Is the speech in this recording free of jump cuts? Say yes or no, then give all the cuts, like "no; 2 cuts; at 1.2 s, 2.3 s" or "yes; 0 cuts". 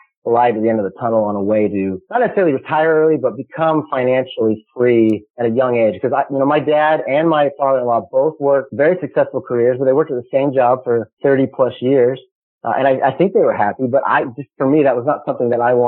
no; 1 cut; at 2.0 s